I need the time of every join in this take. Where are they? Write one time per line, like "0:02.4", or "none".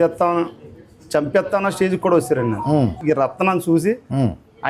0:03.0